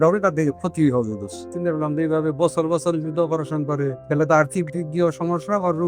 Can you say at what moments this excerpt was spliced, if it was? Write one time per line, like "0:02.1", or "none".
0:01.5
0:04.0